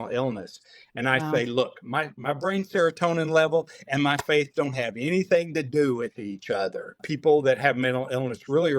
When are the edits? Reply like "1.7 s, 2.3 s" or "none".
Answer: 7.1 s

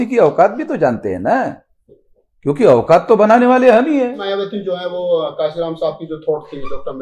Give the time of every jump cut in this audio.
4.2 s

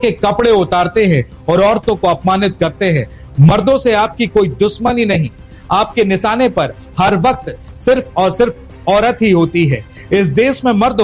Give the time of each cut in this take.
none

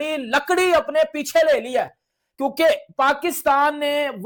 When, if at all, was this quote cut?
none

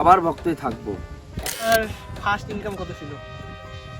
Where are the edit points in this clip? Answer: 1.7 s

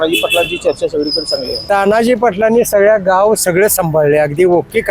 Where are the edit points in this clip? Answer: 1.6 s

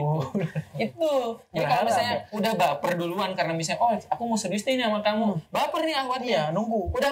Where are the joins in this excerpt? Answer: none

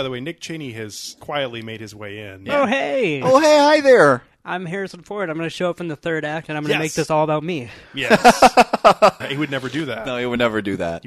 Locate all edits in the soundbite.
1.1 s, 9.2 s

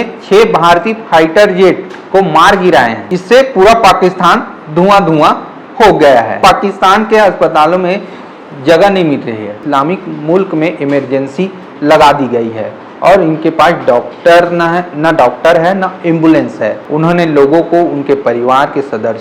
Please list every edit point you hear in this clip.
3.0 s, 6.4 s, 9.6 s, 16.8 s

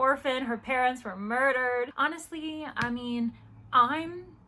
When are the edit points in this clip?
1.9 s

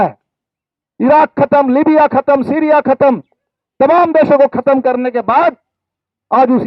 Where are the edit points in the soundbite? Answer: none

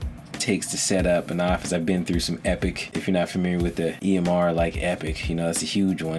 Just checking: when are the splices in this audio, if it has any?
2.9 s, 4.0 s

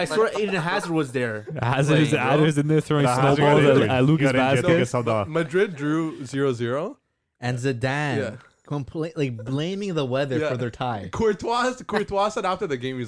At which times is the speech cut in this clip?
none

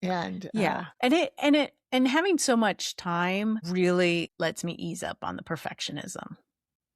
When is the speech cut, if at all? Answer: 0.9 s, 3.7 s, 4.3 s

